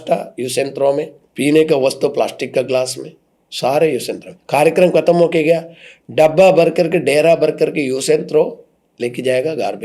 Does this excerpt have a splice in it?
yes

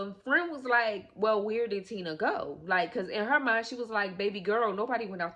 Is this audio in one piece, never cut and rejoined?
yes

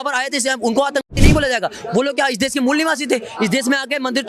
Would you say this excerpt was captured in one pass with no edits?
yes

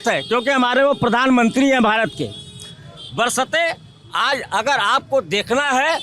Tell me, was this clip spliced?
no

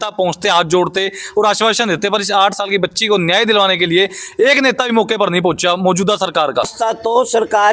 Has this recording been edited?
yes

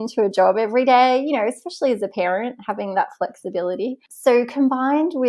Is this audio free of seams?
no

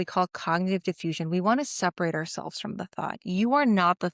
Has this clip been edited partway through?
no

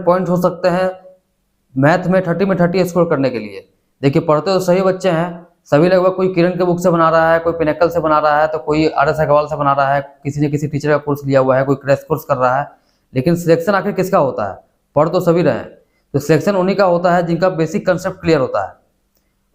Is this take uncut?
yes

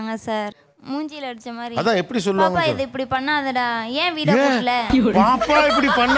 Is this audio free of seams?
yes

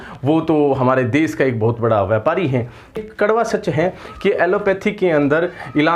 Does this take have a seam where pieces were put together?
yes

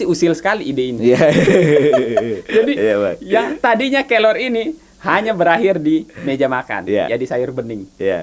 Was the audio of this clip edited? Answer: no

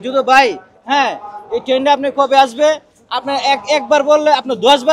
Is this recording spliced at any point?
no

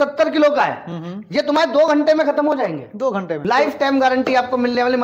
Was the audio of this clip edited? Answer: yes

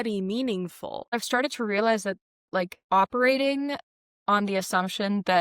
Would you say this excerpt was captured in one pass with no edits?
no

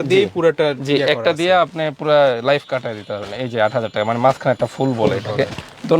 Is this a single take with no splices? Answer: yes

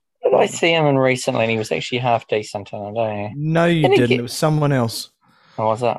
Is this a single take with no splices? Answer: yes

